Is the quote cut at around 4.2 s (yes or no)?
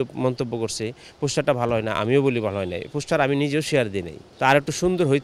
yes